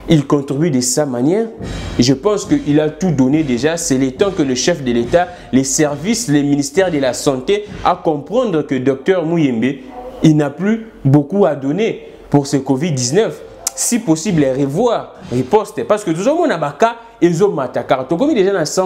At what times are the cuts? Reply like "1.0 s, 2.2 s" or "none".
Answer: none